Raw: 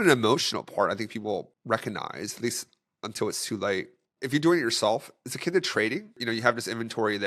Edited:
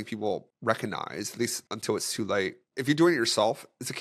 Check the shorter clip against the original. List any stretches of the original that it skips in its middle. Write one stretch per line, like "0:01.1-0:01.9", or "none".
0:02.7-0:03.0
0:04.0-0:04.1